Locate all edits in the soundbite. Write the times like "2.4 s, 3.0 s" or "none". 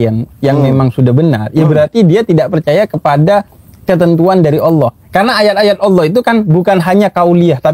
none